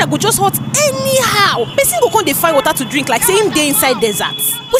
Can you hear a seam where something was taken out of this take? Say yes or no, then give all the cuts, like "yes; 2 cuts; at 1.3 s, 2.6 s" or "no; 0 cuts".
no; 0 cuts